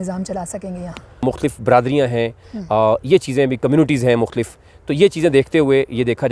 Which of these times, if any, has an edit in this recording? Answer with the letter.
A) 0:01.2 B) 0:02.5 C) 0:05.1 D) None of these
A